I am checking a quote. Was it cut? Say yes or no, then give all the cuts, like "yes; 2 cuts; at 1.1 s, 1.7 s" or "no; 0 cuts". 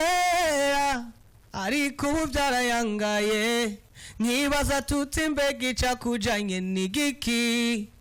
no; 0 cuts